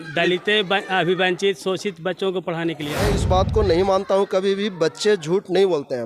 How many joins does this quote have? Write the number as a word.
one